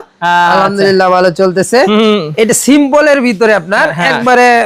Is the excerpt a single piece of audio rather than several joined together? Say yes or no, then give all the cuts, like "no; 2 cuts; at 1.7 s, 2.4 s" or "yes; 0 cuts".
yes; 0 cuts